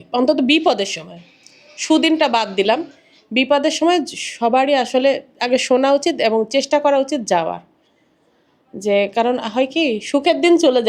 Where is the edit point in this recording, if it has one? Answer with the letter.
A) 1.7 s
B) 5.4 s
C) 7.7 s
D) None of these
D